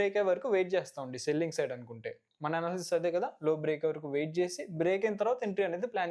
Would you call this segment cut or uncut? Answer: uncut